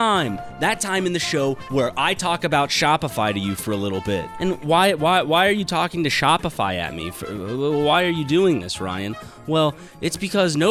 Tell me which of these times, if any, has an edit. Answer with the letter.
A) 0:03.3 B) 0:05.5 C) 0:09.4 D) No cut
D